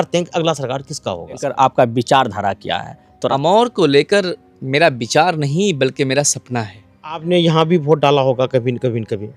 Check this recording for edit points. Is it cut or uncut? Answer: cut